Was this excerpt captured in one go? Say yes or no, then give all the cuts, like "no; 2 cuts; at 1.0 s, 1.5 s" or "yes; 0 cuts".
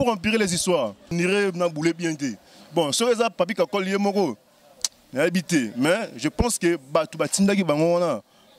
no; 1 cut; at 1.0 s